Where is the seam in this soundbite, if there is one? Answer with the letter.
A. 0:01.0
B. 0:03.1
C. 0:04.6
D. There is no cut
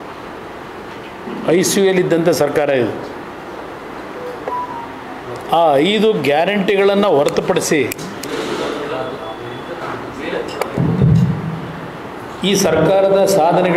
D